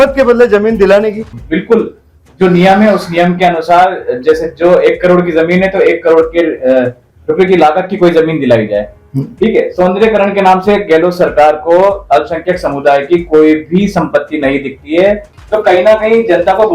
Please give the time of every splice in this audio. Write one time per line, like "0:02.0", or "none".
0:01.3
0:15.3